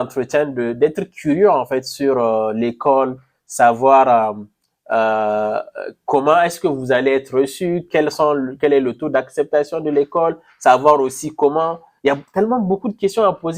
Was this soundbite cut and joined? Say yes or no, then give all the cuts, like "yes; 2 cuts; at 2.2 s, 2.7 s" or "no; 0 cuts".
no; 0 cuts